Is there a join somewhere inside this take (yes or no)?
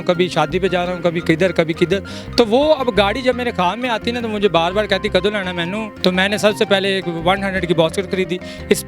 yes